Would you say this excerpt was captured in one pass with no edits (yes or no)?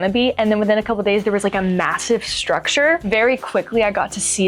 no